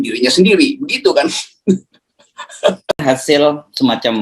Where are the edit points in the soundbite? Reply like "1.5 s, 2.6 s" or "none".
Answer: 3.0 s